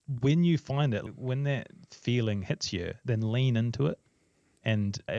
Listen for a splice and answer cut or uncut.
cut